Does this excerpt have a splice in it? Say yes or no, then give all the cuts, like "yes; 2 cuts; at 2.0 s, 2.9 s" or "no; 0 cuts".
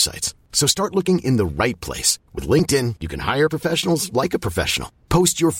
no; 0 cuts